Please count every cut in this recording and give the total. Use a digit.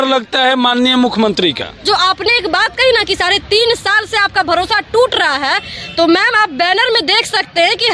1